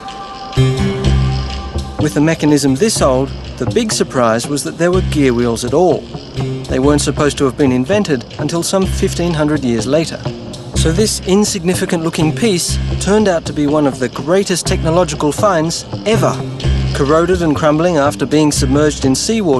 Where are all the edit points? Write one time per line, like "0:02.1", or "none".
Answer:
0:12.0